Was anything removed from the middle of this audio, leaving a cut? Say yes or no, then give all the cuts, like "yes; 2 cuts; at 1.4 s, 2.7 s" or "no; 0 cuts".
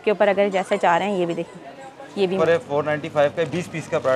yes; 1 cut; at 2.4 s